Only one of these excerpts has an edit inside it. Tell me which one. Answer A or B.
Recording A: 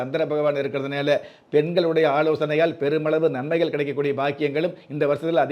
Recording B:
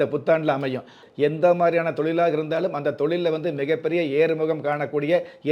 B